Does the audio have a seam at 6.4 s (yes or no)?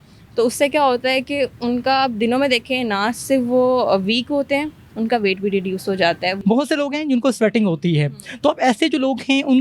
yes